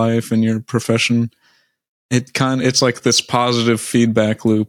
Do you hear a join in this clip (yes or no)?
no